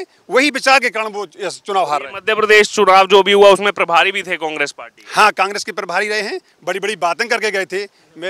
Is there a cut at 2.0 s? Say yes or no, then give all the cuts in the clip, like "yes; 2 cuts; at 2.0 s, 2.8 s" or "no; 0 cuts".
no; 0 cuts